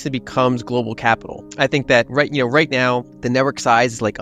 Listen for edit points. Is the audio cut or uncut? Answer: cut